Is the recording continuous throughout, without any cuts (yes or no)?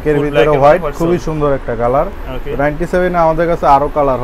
yes